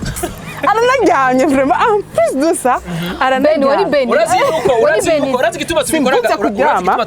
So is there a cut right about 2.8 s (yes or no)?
no